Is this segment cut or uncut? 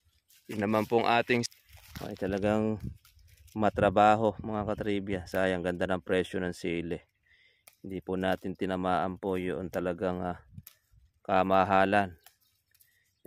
cut